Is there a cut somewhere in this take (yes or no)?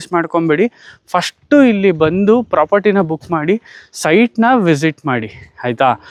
no